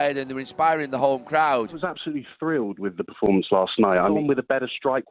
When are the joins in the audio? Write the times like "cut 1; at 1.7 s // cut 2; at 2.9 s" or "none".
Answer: cut 1; at 1.7 s // cut 2; at 4.1 s

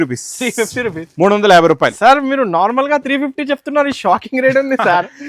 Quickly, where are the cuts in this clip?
none

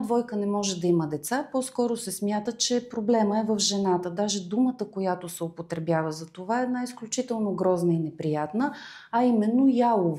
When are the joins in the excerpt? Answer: none

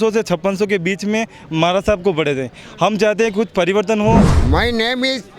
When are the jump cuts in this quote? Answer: cut 1; at 4.3 s

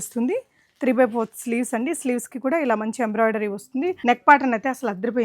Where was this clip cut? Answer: cut 1; at 4.0 s

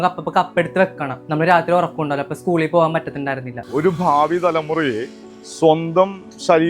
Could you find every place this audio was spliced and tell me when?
cut 1; at 1.2 s // cut 2; at 3.5 s

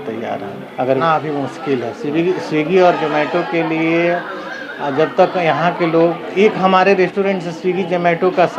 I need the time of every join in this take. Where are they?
cut 1; at 1.0 s

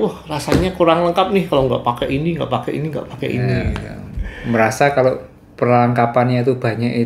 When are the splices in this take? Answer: none

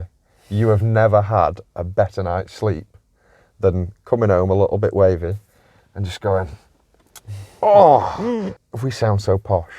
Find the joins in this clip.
cut 1; at 8.5 s

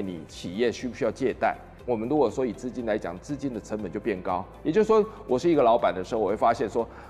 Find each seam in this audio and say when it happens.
none

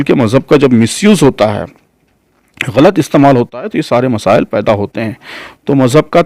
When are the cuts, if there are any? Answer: none

